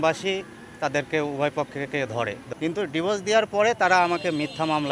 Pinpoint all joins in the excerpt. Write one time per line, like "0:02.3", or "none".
0:02.4